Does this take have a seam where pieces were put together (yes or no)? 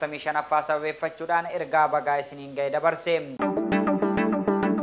yes